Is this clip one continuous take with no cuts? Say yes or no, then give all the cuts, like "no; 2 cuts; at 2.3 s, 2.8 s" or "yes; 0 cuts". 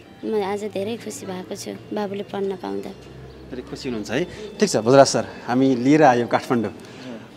yes; 0 cuts